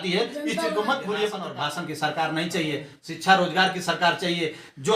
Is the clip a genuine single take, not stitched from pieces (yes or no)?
no